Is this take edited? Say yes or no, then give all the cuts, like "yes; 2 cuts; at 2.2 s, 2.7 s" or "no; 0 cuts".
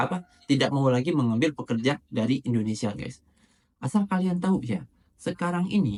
no; 0 cuts